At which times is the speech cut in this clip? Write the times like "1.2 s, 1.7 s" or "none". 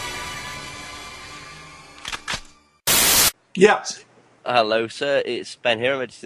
none